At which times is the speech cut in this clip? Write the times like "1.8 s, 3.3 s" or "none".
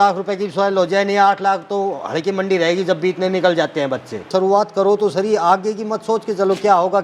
4.3 s